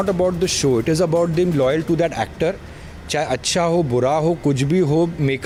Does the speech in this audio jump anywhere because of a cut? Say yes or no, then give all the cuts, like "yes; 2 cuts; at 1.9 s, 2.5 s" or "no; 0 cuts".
no; 0 cuts